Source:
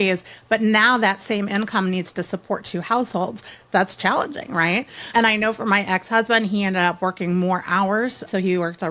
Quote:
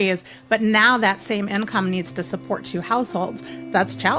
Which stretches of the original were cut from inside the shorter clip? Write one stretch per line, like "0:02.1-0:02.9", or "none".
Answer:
none